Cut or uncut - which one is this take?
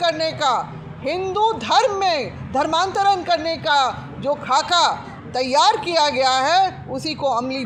uncut